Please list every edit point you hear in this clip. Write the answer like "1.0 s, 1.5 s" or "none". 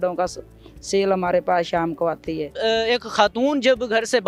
2.5 s